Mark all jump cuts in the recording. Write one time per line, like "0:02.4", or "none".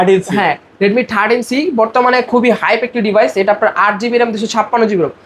none